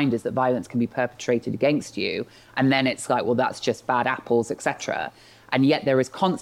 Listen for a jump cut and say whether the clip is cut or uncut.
uncut